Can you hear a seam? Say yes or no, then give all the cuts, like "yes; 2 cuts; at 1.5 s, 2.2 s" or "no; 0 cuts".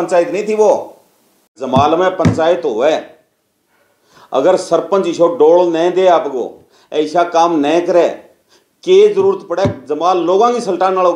yes; 1 cut; at 1.6 s